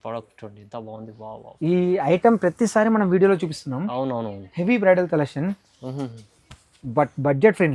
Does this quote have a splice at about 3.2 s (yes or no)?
no